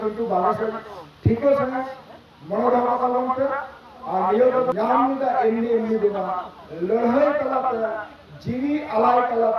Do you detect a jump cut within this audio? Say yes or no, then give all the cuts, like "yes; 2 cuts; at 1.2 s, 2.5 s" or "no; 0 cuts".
yes; 1 cut; at 4.7 s